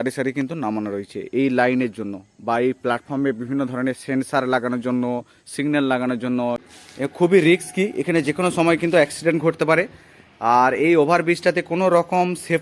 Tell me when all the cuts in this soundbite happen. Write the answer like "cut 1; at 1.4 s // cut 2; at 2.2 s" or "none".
cut 1; at 6.6 s